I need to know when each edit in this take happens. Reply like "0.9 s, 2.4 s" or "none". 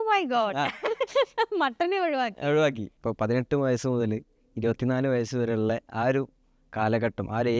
2.9 s